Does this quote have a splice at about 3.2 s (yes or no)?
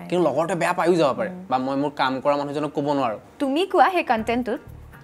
yes